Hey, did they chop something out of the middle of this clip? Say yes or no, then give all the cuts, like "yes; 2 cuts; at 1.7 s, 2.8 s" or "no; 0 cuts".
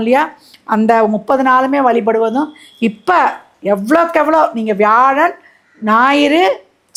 no; 0 cuts